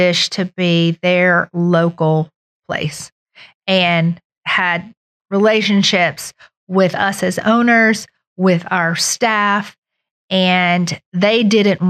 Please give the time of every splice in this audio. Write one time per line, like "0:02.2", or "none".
none